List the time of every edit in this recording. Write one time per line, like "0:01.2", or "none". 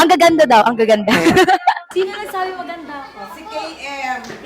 0:01.8